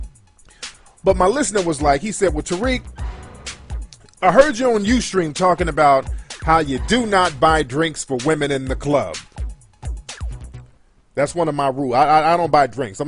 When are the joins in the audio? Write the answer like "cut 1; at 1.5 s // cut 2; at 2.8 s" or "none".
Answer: cut 1; at 5.6 s